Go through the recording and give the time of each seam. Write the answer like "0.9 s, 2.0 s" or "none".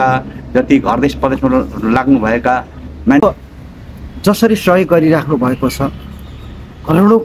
3.2 s